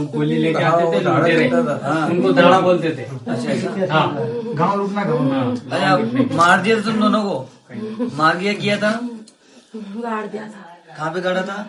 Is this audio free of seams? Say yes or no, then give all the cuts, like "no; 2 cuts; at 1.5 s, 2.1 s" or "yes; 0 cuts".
yes; 0 cuts